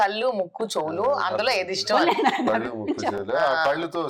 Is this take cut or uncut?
uncut